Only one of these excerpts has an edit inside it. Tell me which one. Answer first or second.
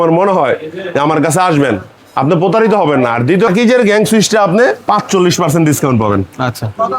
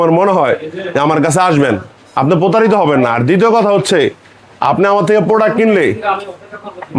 first